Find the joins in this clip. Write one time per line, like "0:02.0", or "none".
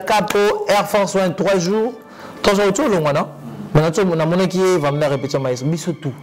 none